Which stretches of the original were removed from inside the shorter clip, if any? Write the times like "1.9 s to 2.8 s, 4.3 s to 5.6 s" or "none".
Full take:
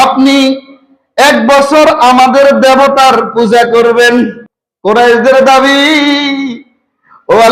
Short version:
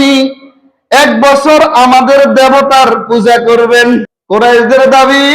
4.4 s to 4.7 s